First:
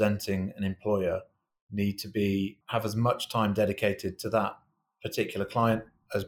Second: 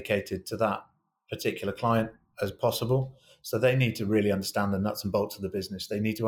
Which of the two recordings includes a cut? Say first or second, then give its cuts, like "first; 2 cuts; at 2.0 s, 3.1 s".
first; 1 cut; at 2.6 s